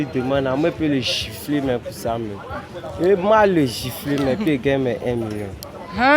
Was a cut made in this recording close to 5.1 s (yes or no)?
no